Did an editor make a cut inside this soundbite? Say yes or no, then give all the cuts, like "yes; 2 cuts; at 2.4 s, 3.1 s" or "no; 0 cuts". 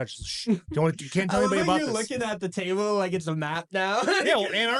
no; 0 cuts